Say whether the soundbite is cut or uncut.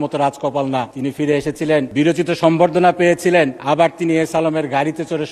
cut